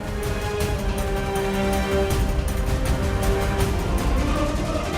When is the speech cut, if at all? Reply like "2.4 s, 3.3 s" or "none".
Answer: 4.0 s

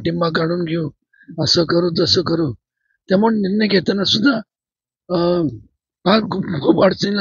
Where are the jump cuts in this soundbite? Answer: none

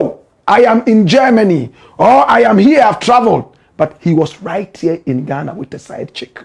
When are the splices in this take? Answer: none

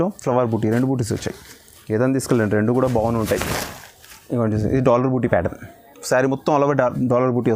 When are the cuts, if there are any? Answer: none

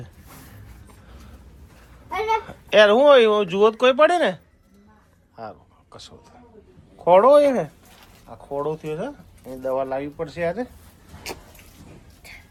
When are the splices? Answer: none

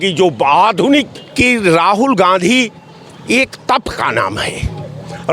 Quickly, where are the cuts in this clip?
1.2 s

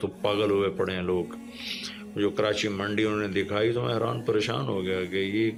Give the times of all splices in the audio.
none

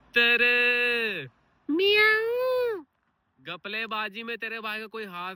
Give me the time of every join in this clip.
none

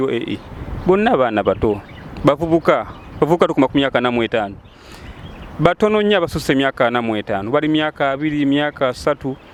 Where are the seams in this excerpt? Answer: none

